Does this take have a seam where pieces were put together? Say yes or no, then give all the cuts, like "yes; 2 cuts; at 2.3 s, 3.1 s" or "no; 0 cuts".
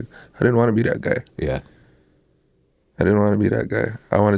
no; 0 cuts